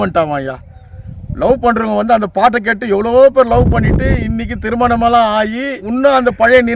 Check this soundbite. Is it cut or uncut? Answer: cut